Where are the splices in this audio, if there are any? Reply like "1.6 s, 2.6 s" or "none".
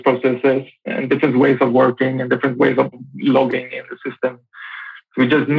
0.9 s, 3.0 s